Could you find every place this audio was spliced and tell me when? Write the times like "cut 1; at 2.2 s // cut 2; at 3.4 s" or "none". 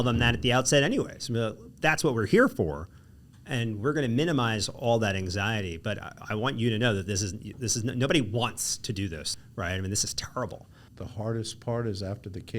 cut 1; at 10.7 s